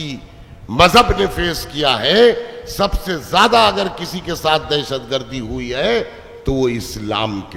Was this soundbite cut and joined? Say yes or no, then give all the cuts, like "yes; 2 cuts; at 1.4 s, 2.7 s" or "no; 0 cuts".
no; 0 cuts